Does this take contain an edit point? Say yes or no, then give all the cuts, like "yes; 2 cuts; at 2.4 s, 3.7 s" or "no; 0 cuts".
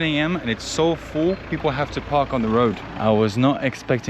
yes; 1 cut; at 2.9 s